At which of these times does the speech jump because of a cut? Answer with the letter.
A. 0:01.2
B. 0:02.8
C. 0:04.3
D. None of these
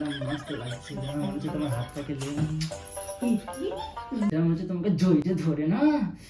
C